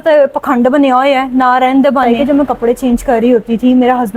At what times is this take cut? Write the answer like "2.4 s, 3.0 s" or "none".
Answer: 2.1 s